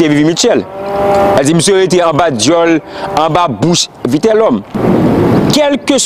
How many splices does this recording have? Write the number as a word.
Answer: one